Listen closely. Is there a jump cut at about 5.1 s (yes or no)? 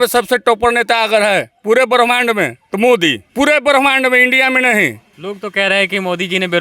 yes